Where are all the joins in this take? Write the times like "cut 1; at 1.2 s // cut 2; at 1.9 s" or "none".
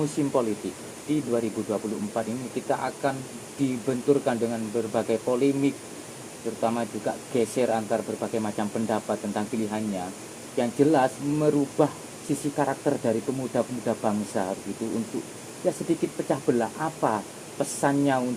cut 1; at 1.0 s